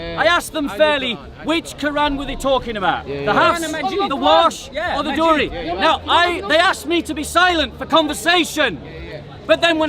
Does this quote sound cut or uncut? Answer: uncut